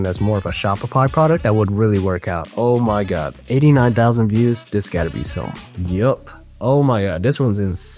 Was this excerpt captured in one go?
no; 1 cut; at 2.5 s

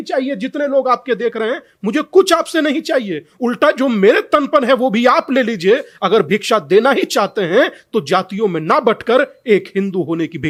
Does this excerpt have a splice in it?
no; 0 cuts

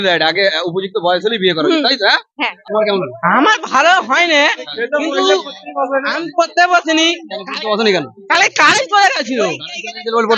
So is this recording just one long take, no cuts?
no; 1 cut; at 2.6 s

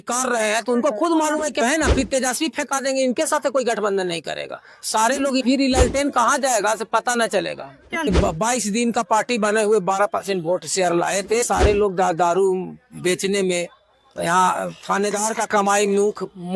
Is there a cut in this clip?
yes; 4 cuts; at 1.6 s, 5.4 s, 8.1 s, 11.4 s

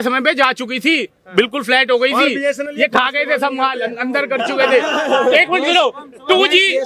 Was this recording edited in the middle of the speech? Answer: no; 0 cuts

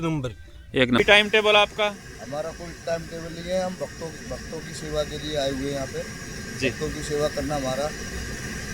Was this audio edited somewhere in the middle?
yes; 1 cut; at 1.0 s

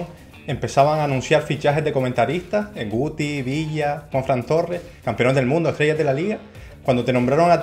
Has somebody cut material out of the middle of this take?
no; 0 cuts

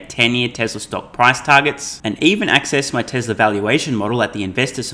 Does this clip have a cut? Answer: no; 0 cuts

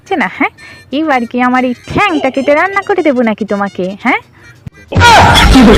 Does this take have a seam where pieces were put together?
no; 0 cuts

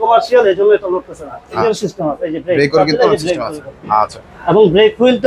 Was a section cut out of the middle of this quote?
yes; 1 cut; at 1.6 s

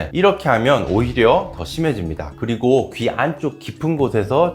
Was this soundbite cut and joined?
yes; 1 cut; at 2.3 s

